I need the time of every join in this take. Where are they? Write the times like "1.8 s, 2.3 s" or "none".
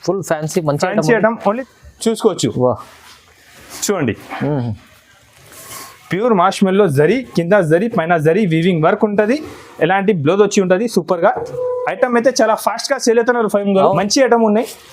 1.6 s, 13.9 s

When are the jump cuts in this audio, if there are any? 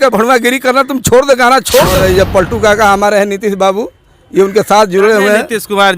2.0 s

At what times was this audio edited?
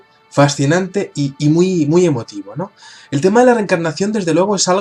3.9 s

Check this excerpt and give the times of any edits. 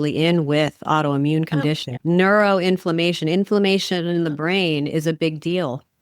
1.9 s

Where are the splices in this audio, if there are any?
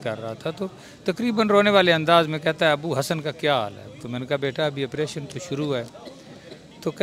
none

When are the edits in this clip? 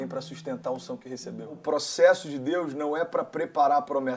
1.6 s

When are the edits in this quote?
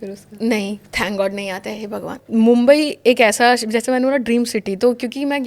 2.2 s

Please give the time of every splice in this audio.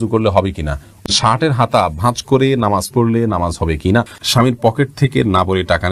1.1 s, 4.2 s

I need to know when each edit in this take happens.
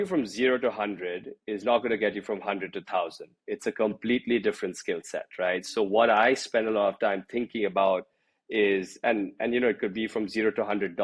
none

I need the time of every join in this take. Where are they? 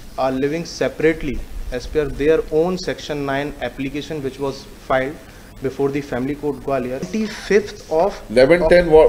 7.1 s

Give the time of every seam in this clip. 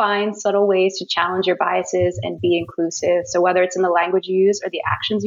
none

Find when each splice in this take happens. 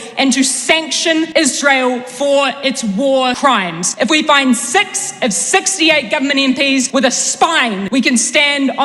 1.3 s, 3.6 s, 6.9 s, 7.8 s

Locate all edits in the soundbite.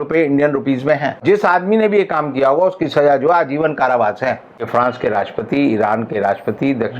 1.2 s, 4.6 s

